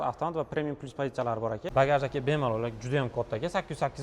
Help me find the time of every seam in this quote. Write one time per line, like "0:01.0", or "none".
0:01.7